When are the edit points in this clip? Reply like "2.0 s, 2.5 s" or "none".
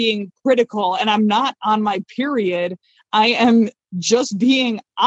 none

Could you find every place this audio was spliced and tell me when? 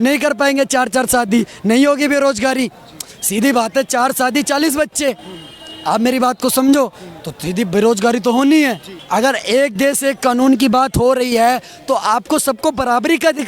8.9 s

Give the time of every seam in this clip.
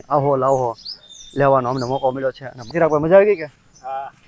2.7 s

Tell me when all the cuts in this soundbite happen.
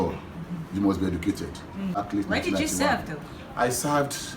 2.0 s

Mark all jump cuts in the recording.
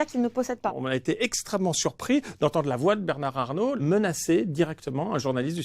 0.8 s, 3.8 s

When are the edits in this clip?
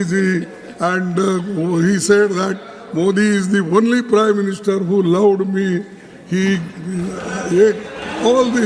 none

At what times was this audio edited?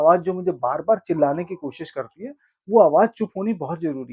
none

